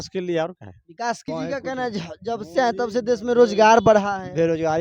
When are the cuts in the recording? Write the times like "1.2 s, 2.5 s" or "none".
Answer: 1.2 s